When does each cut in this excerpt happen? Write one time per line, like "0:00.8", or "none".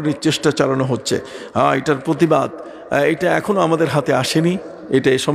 none

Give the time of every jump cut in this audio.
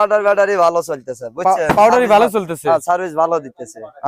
none

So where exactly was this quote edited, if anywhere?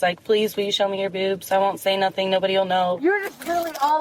0:03.0

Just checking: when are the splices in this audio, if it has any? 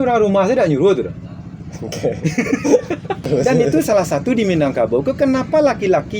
0:03.2

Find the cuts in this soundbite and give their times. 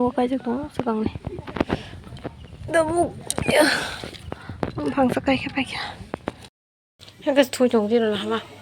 0:06.6

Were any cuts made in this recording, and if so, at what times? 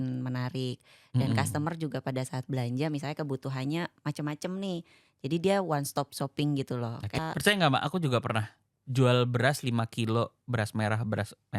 0:07.2

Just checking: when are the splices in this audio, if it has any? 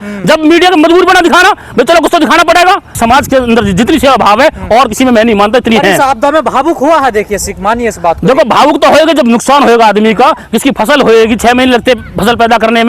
0:02.9

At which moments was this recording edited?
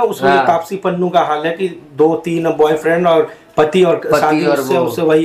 none

